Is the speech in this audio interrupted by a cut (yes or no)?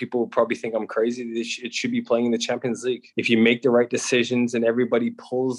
yes